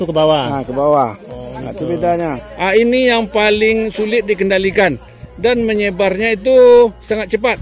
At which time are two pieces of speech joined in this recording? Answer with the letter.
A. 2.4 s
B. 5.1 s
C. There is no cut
A